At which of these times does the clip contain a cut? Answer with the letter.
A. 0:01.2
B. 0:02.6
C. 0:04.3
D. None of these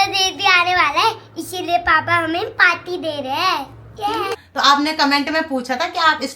C